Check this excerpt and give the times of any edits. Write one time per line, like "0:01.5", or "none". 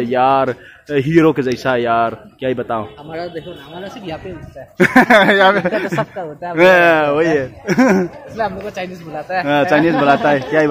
none